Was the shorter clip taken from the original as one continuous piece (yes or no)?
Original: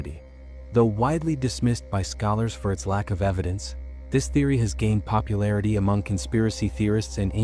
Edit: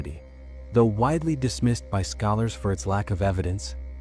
yes